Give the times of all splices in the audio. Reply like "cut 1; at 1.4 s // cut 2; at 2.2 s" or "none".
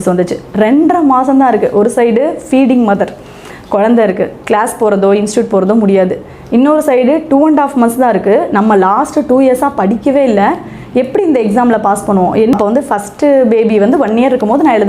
cut 1; at 12.5 s